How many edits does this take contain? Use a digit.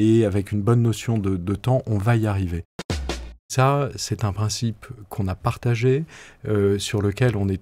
1